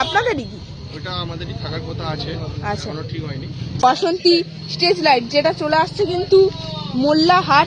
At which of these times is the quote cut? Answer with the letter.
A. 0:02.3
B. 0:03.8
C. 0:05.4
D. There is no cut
B